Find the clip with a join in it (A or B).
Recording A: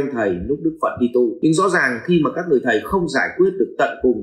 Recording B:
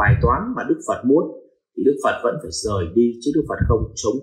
A